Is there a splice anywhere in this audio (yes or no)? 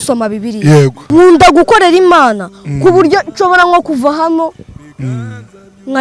yes